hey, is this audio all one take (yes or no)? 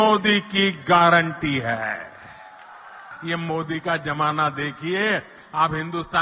no